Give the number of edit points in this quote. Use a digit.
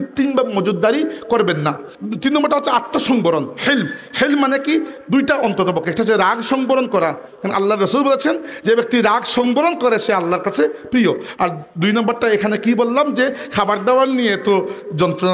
1